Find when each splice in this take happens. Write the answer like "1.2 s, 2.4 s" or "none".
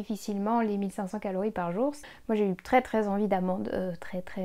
2.1 s